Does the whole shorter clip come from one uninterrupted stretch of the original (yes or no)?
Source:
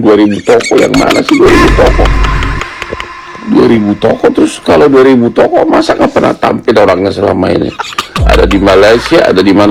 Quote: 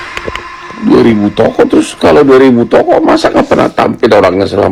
yes